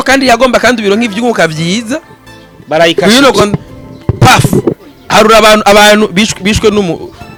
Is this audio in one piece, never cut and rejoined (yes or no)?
yes